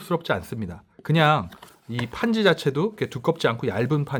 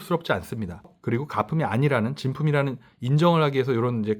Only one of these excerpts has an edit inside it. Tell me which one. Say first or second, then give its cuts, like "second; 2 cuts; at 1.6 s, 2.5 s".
second; 1 cut; at 0.9 s